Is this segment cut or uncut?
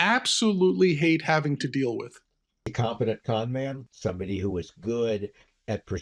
cut